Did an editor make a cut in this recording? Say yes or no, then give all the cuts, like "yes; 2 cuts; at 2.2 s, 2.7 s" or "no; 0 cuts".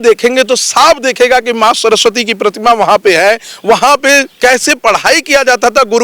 no; 0 cuts